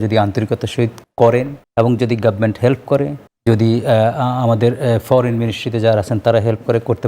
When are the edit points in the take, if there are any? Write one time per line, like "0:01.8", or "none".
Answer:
0:01.0
0:01.6
0:03.2